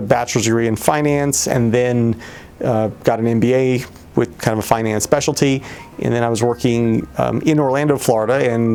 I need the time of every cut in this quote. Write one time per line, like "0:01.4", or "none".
none